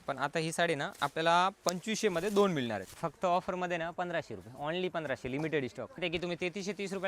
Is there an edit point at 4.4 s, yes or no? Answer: no